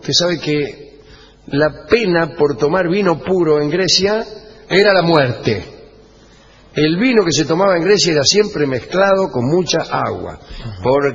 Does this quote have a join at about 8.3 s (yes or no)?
yes